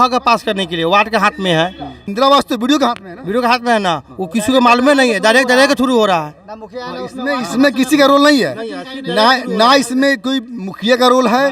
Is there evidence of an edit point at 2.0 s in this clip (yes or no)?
yes